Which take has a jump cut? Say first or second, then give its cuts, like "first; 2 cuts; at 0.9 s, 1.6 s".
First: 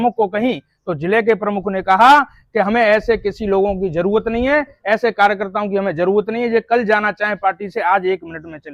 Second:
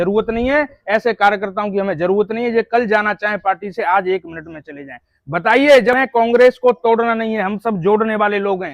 second; 1 cut; at 5.9 s